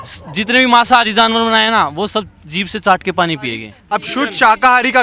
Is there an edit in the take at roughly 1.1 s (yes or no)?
no